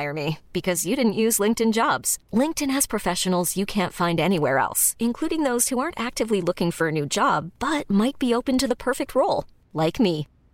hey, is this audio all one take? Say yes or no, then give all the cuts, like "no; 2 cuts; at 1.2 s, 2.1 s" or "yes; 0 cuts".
yes; 0 cuts